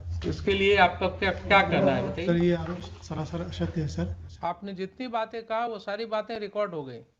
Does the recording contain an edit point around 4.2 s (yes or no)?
yes